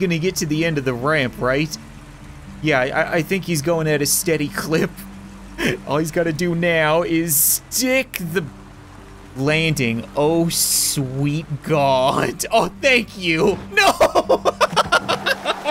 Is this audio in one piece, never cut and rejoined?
yes; 0 cuts

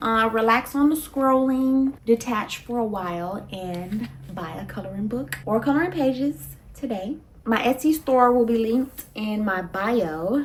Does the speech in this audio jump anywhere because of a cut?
no; 0 cuts

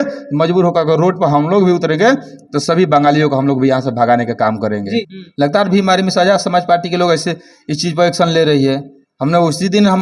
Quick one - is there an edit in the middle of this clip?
yes; 1 cut; at 5.2 s

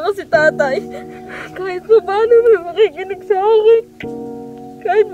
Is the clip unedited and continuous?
yes; 0 cuts

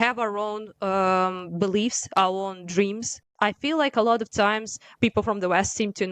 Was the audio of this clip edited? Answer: yes; 2 cuts; at 3.2 s, 4.9 s

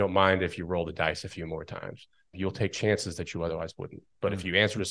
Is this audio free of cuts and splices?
no; 1 cut; at 2.3 s

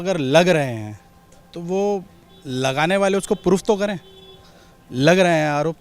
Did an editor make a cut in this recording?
no; 0 cuts

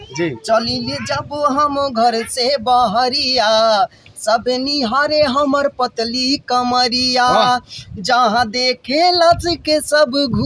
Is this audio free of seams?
yes; 0 cuts

